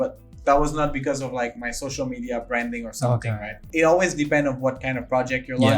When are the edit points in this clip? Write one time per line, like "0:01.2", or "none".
0:03.5